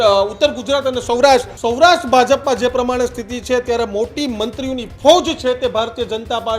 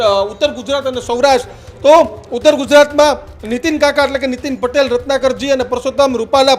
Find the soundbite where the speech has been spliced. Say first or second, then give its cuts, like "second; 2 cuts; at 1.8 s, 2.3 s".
first; 1 cut; at 1.5 s